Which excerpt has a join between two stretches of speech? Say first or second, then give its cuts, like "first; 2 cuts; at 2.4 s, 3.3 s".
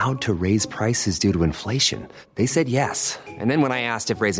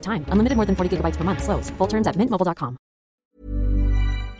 second; 1 cut; at 3.2 s